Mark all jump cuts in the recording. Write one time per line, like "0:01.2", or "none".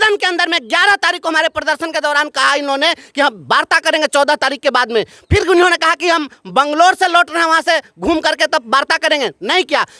none